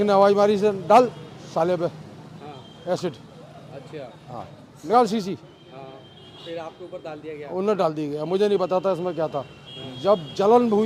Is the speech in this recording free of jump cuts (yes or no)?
yes